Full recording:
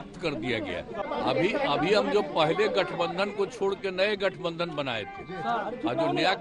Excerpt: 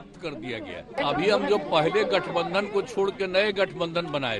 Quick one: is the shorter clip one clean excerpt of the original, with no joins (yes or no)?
no